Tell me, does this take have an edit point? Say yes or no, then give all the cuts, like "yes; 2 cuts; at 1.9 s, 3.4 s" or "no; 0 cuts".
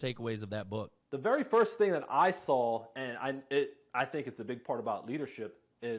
yes; 1 cut; at 1.0 s